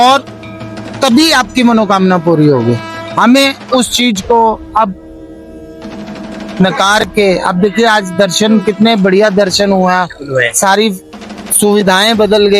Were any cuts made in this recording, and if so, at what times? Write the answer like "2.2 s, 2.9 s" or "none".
3.0 s

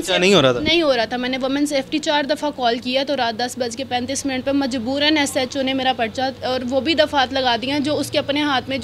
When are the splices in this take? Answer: none

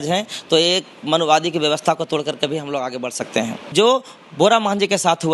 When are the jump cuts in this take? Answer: 3.7 s

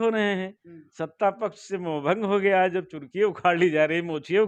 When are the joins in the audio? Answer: none

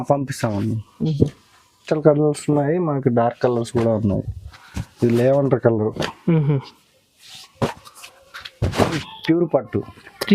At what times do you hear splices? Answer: 1.8 s, 9.1 s

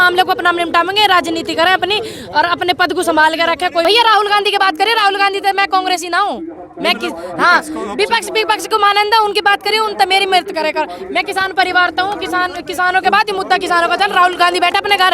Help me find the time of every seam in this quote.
3.8 s

